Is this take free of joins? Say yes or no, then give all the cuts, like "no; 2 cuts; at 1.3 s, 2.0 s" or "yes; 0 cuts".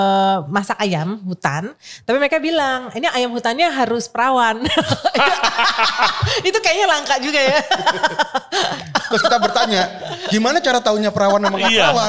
yes; 0 cuts